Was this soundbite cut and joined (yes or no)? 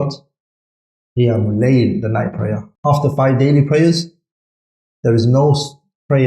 yes